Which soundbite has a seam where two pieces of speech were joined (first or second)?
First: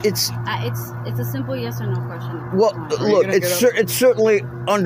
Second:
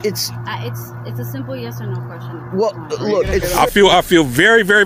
second